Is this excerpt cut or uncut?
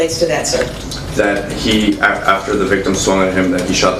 uncut